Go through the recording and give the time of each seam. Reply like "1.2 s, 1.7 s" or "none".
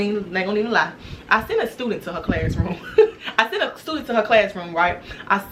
none